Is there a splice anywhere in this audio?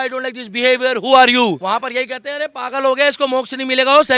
no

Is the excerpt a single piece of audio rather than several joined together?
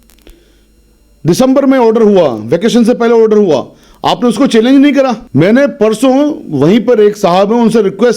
no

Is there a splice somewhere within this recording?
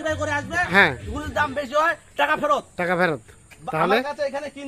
no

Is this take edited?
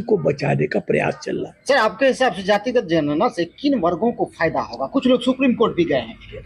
no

